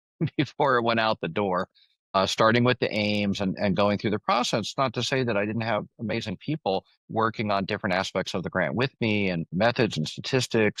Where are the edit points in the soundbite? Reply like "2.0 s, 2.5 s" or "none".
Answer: 2.1 s, 7.0 s